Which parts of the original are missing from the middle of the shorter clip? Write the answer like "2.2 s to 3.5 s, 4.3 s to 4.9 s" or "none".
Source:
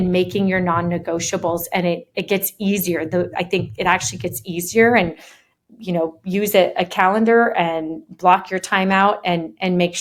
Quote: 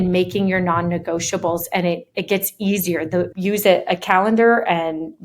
3.3 s to 6.2 s

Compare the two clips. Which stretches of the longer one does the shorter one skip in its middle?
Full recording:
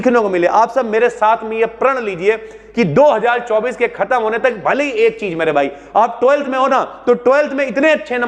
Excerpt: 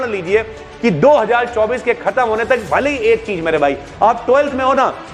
none

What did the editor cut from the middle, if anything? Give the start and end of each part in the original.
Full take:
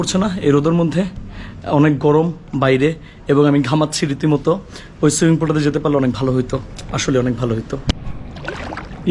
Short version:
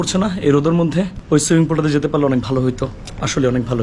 1.2 s to 4.9 s

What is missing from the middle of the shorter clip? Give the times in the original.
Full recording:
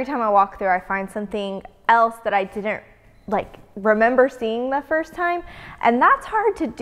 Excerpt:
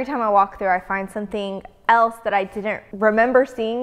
2.9 s to 3.7 s

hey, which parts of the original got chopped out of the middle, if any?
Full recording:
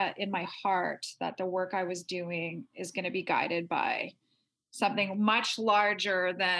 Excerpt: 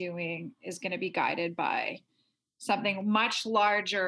none

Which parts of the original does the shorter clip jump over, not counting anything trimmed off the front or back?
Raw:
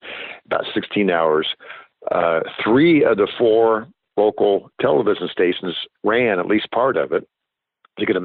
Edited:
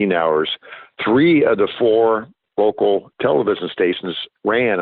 1.9 s to 2.5 s

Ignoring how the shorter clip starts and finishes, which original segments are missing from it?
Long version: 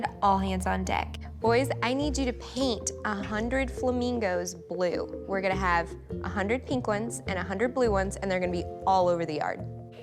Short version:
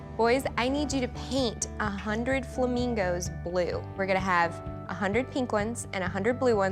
5.1 s to 5.2 s

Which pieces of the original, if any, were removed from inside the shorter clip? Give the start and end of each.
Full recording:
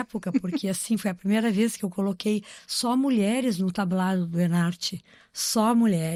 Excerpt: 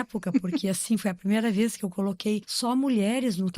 2.5 s to 2.7 s

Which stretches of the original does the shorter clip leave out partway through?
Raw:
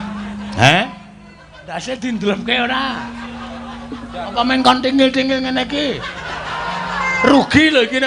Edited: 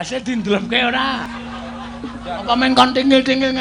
3.0 s to 3.1 s

